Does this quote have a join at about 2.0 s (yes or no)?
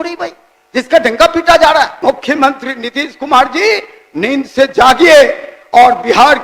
yes